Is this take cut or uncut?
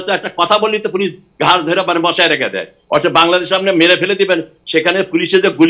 uncut